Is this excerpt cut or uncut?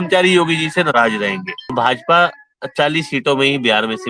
cut